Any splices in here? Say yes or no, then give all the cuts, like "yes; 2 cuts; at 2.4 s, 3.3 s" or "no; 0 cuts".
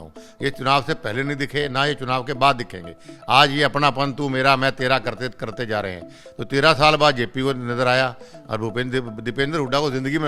no; 0 cuts